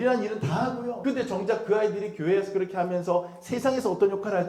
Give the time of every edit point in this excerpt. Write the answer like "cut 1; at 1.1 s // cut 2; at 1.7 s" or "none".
cut 1; at 0.9 s